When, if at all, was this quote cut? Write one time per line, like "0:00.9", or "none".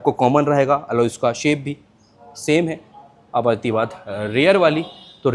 none